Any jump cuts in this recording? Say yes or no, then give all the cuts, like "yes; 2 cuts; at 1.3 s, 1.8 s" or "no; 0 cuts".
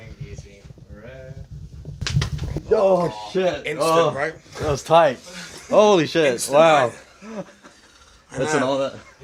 no; 0 cuts